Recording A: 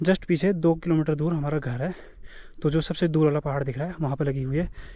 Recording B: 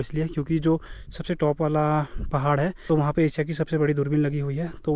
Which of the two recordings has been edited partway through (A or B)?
B